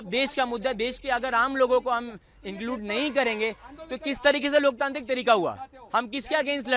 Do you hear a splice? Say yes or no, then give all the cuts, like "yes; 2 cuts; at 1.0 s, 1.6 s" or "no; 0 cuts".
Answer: no; 0 cuts